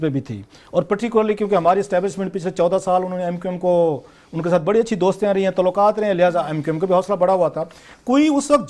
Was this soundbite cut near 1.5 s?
no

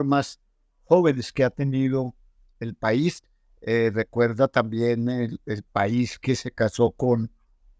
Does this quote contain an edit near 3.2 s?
no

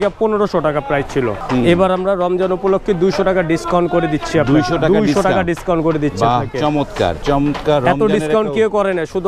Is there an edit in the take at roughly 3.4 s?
no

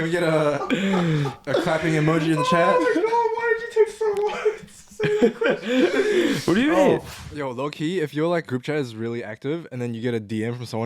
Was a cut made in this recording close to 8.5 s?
yes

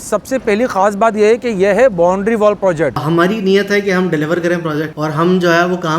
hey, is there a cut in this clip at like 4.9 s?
yes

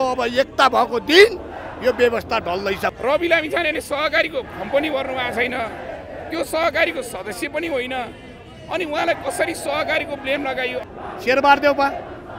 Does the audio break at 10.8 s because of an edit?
yes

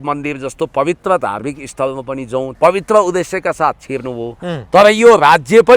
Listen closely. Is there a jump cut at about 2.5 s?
yes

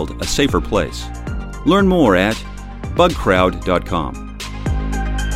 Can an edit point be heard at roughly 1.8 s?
no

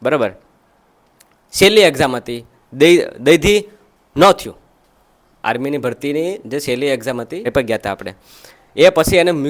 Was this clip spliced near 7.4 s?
yes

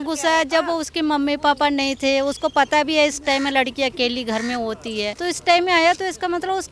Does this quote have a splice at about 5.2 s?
yes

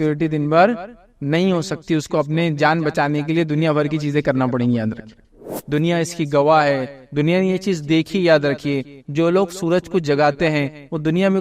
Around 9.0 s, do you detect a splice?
no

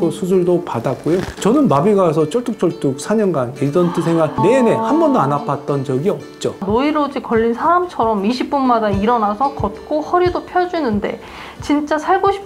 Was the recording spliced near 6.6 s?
yes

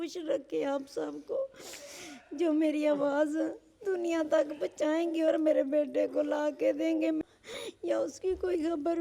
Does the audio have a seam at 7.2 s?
yes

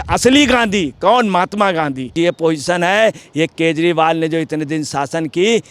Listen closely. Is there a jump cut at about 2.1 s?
yes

